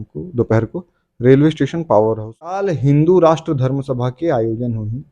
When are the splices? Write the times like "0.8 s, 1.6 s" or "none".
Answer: 2.7 s